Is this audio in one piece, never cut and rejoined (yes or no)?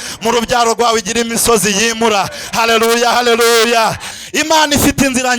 no